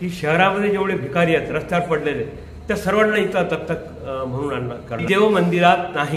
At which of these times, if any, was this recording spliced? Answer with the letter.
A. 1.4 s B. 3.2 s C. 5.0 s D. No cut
C